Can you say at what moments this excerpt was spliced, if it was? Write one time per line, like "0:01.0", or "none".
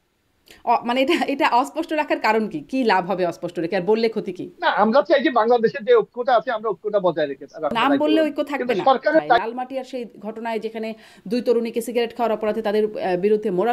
0:07.7
0:09.4